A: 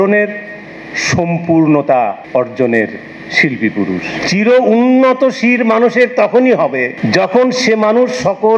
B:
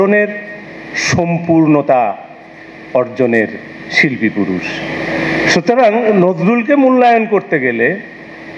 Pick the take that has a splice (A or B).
A